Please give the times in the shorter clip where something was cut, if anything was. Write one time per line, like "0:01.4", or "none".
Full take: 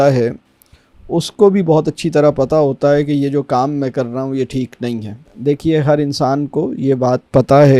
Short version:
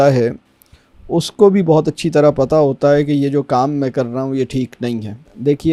none

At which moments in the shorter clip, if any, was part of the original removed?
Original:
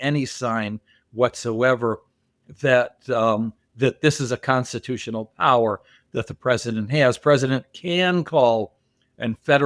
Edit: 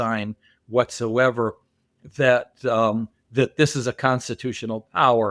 none

